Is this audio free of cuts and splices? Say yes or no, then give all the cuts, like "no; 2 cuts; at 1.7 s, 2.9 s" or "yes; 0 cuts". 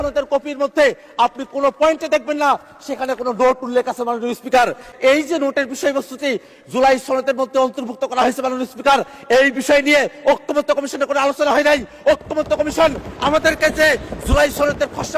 no; 1 cut; at 4.9 s